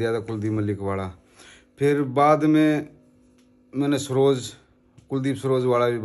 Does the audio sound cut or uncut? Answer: uncut